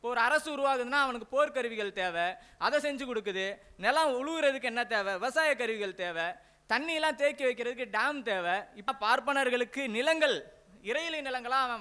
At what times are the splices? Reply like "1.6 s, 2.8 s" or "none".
8.9 s